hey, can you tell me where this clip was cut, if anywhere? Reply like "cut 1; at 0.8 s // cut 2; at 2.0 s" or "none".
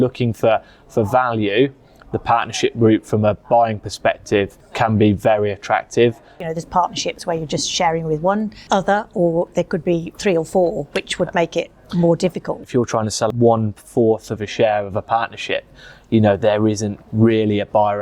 cut 1; at 4.6 s // cut 2; at 6.4 s // cut 3; at 8.6 s // cut 4; at 12.8 s